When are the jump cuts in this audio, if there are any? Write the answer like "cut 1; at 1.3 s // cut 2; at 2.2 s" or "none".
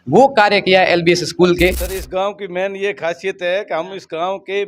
cut 1; at 1.9 s